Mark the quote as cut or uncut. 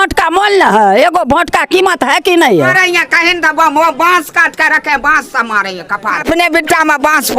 cut